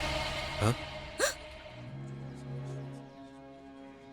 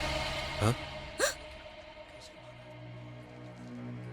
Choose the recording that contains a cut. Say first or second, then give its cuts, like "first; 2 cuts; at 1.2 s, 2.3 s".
first; 2 cuts; at 1.8 s, 2.9 s